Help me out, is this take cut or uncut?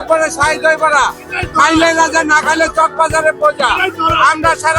uncut